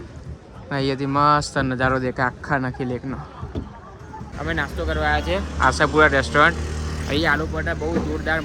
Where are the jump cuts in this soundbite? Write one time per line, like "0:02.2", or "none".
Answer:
0:04.2